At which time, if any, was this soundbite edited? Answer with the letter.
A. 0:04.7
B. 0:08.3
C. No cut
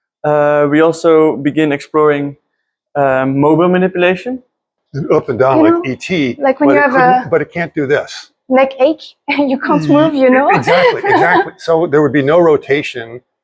A